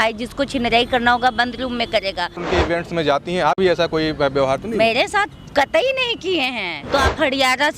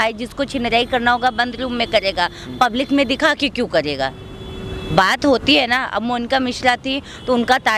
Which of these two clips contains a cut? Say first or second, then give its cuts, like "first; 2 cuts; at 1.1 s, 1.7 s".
first; 2 cuts; at 2.4 s, 6.7 s